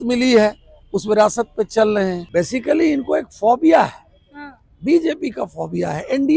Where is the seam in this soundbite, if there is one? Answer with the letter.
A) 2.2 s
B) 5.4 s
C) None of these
A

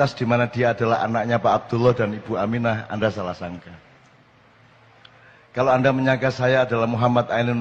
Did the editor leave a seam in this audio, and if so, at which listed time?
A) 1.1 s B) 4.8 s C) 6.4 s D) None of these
D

